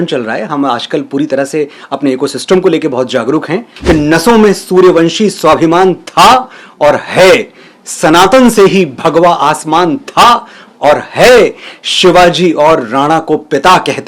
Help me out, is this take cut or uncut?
cut